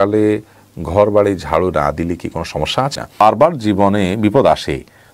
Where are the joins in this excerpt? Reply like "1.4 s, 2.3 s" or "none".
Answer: 3.2 s